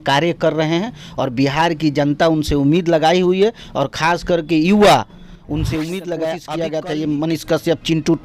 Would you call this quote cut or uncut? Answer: cut